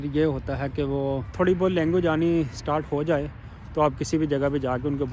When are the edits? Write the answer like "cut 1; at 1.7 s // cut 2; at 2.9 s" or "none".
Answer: cut 1; at 1.3 s